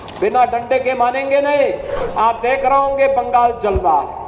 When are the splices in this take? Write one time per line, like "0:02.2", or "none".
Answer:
0:02.0